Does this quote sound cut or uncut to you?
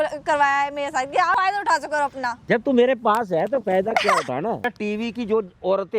cut